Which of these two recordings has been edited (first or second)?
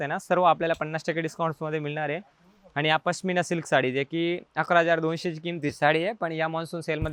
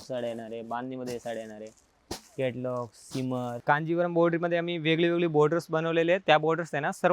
second